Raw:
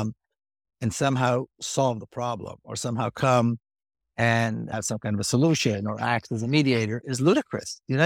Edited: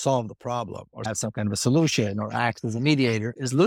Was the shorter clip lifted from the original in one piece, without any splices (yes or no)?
no